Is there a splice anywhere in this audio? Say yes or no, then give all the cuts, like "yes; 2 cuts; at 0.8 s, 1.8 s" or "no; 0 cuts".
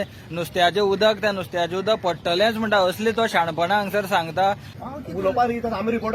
yes; 1 cut; at 4.7 s